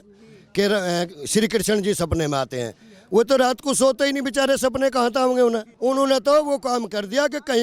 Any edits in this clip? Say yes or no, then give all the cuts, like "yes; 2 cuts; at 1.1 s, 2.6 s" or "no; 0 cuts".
yes; 1 cut; at 5.7 s